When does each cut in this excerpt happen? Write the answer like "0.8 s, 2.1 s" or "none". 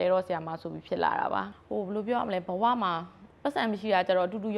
1.5 s